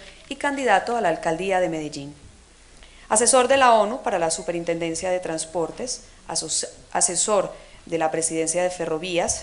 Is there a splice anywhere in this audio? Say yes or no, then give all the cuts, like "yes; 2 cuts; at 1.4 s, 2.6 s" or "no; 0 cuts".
no; 0 cuts